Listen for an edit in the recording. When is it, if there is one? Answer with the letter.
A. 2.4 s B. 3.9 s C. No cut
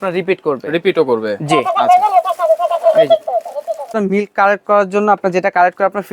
B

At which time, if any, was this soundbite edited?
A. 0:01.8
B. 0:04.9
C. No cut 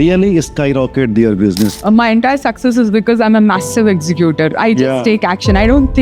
A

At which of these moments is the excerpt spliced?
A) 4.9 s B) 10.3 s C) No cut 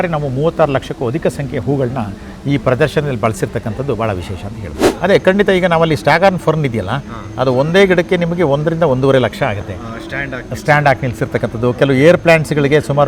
A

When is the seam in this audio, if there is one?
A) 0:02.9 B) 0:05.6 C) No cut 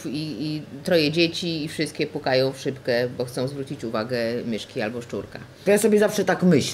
B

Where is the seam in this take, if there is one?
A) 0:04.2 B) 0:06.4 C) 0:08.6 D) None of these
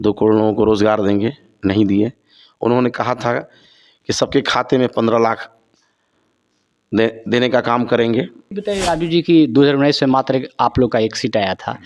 C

